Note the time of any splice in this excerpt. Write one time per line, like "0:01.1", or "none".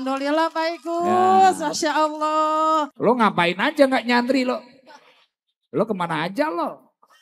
0:02.9